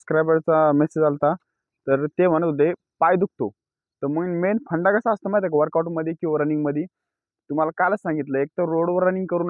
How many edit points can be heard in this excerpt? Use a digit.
0